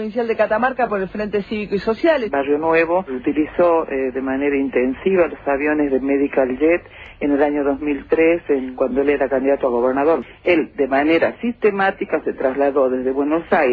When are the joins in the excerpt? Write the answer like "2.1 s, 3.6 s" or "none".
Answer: 10.2 s